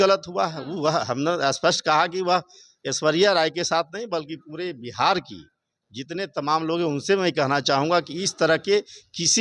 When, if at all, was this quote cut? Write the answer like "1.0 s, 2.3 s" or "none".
none